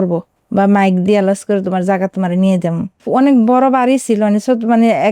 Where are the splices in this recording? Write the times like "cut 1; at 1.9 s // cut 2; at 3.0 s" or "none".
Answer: cut 1; at 2.9 s